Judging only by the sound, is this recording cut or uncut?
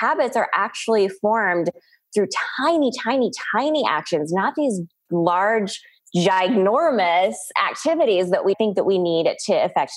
uncut